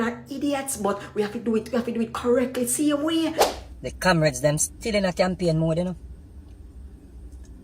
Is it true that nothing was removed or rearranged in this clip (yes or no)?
no